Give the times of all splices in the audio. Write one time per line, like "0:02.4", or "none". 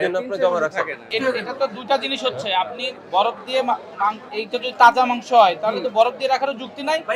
0:01.1

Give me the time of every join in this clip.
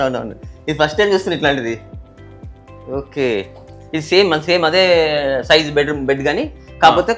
none

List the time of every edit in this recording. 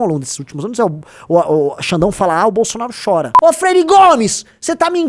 0:03.3

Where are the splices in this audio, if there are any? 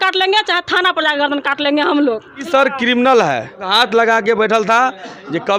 0:02.5
0:03.7

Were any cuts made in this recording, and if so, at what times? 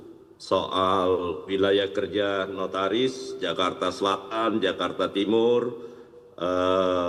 none

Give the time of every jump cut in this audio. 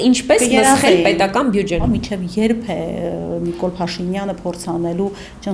0:01.8

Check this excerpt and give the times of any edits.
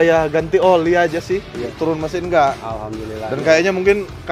0:01.7

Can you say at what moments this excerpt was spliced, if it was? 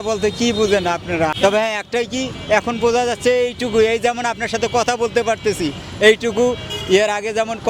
0:01.3

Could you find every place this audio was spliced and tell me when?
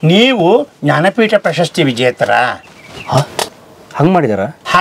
none

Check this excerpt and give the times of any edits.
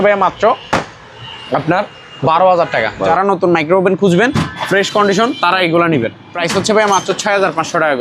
0:03.1
0:06.3

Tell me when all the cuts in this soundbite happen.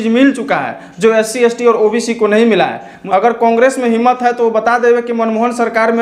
0:02.9

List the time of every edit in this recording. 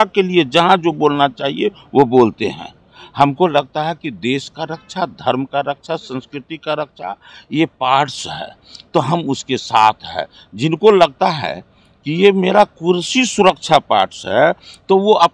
none

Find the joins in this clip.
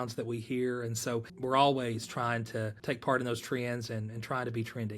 0:01.3
0:02.8

